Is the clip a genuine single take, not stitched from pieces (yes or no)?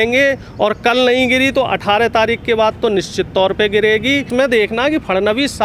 no